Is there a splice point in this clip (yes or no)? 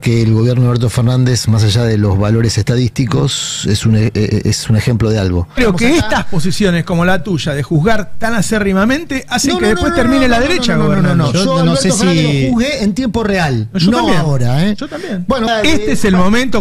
yes